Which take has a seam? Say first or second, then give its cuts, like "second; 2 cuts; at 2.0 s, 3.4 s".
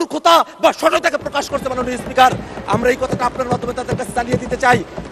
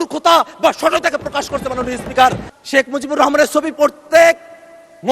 second; 1 cut; at 2.5 s